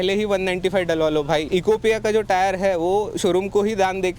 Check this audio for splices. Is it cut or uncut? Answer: cut